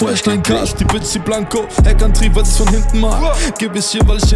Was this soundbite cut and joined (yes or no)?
no